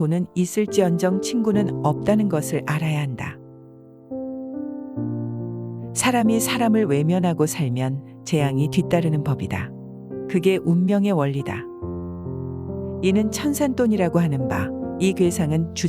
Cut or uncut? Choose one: cut